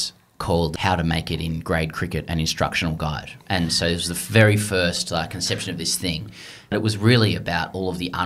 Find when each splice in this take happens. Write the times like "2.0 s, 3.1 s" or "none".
0.7 s, 6.7 s